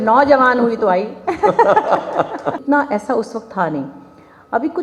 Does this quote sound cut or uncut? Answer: cut